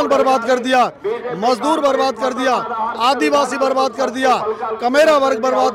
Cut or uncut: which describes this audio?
uncut